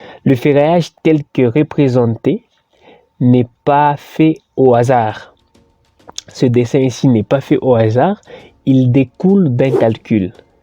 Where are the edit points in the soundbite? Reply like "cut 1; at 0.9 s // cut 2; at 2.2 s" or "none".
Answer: cut 1; at 0.9 s

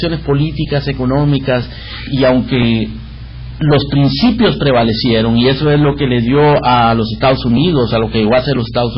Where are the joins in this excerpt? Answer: none

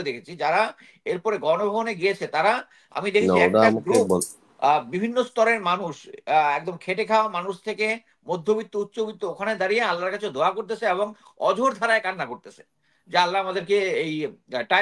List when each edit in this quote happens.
none

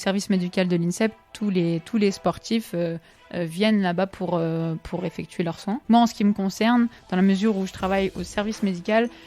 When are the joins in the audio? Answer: cut 1; at 5.8 s

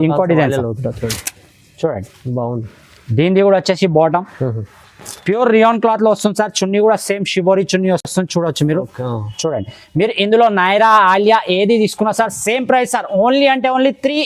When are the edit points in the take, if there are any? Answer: none

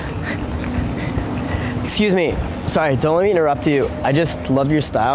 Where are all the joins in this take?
none

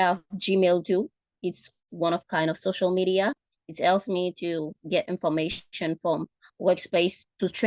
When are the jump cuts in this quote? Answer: none

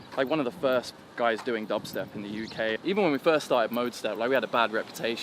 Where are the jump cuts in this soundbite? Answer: cut 1; at 2.8 s

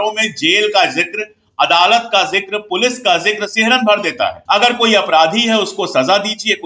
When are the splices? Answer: cut 1; at 4.4 s

